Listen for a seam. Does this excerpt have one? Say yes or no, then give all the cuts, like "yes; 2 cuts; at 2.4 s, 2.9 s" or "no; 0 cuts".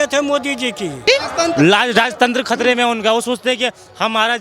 yes; 1 cut; at 1.0 s